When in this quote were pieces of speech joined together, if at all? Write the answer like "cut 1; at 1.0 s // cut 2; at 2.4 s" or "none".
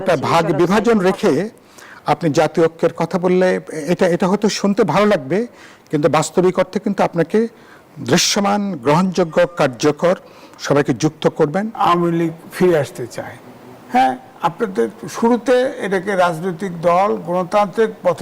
cut 1; at 11.7 s